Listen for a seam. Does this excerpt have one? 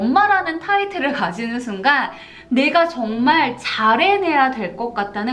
no; 0 cuts

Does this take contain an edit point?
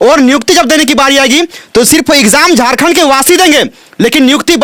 no; 0 cuts

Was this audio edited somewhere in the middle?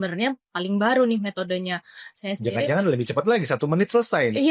no; 0 cuts

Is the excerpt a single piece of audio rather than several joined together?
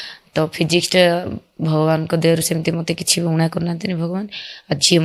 yes; 0 cuts

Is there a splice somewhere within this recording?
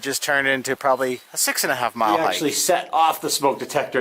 yes; 1 cut; at 2.4 s

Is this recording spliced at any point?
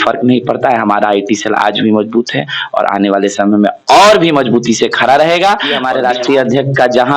yes; 1 cut; at 5.7 s

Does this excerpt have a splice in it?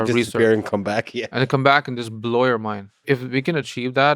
yes; 1 cut; at 3.0 s

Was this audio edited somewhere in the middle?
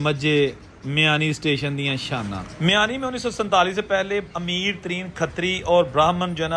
yes; 1 cut; at 2.4 s

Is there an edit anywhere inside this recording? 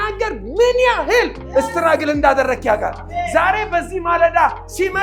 no; 0 cuts

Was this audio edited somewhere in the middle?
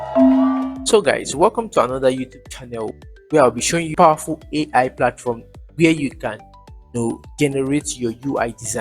yes; 1 cut; at 3.9 s

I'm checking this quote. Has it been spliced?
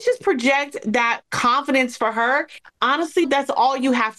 yes; 1 cut; at 3.2 s

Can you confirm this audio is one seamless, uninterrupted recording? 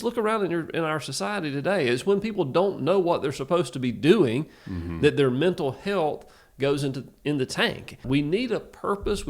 no; 1 cut; at 8.0 s

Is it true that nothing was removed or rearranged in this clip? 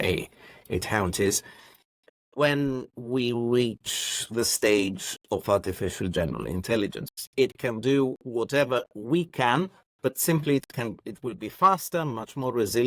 no; 1 cut; at 7.1 s

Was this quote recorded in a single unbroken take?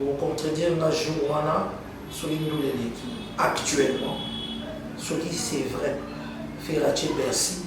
yes; 0 cuts

